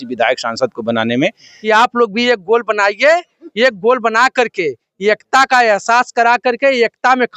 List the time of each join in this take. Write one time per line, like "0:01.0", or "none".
0:01.5